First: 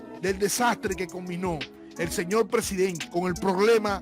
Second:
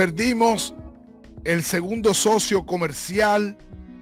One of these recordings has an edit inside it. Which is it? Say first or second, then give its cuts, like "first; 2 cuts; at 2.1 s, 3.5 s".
first; 1 cut; at 3.0 s